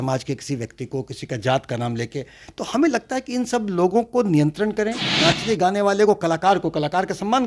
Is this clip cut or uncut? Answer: cut